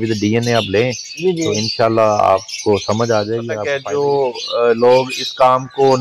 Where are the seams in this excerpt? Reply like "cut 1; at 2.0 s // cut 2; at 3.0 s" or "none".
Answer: cut 1; at 3.6 s